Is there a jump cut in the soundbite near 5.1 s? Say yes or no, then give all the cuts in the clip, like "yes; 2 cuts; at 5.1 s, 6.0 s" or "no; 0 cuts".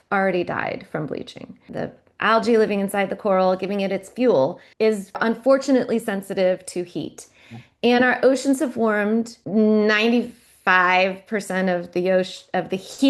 yes; 3 cuts; at 1.7 s, 5.1 s, 9.4 s